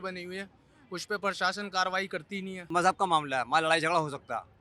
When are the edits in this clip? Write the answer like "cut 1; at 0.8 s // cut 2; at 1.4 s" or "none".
cut 1; at 2.7 s

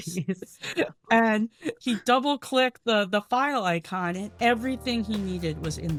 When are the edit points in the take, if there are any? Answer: none

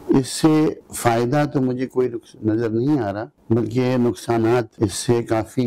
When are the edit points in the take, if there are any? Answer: cut 1; at 0.9 s // cut 2; at 3.3 s // cut 3; at 4.7 s

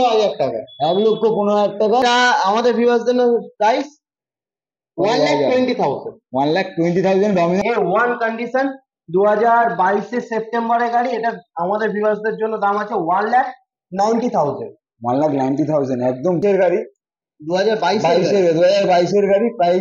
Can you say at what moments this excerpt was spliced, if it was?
cut 1; at 2.0 s // cut 2; at 7.6 s // cut 3; at 16.4 s

